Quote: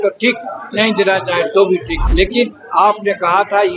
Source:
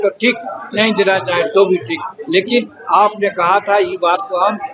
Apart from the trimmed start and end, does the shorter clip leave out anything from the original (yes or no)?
yes